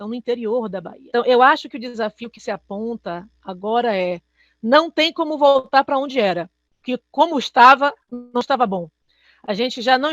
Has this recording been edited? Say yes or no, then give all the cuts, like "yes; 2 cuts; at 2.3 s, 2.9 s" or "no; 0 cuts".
yes; 1 cut; at 1.0 s